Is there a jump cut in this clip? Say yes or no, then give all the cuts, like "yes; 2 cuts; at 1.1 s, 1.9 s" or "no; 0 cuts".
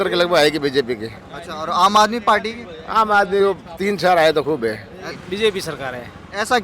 yes; 1 cut; at 5.2 s